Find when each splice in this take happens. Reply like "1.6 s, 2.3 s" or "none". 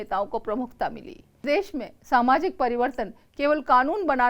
1.4 s